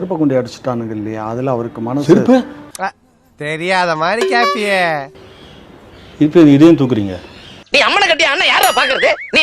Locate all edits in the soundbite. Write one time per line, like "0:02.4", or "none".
none